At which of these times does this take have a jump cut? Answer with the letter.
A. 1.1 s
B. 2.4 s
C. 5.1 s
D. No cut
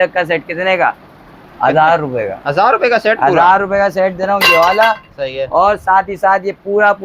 D